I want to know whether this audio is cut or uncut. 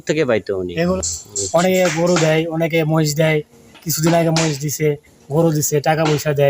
cut